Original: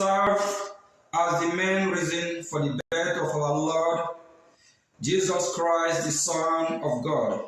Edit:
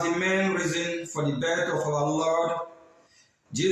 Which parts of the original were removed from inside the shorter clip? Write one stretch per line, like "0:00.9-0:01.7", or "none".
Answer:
0:02.8-0:02.9